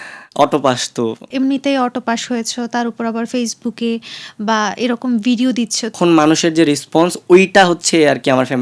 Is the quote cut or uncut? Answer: cut